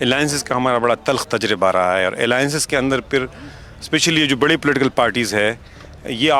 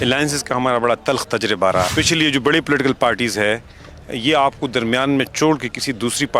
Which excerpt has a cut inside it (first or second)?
second